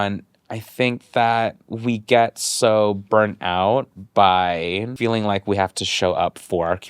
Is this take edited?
yes; 1 cut; at 4.9 s

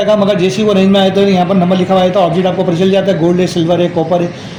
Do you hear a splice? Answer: no; 0 cuts

